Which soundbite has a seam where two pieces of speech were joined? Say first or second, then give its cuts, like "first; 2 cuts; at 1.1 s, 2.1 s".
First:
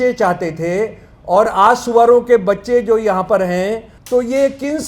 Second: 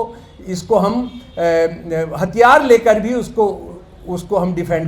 first; 1 cut; at 3.9 s